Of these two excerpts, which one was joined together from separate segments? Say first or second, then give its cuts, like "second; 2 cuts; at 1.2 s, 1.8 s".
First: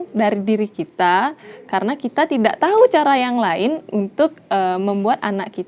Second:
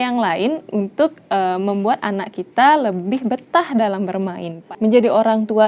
second; 1 cut; at 4.6 s